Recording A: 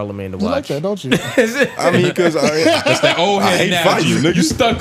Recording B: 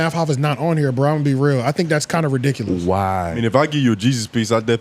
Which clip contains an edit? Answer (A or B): B